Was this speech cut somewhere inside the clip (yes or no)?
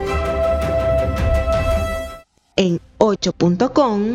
no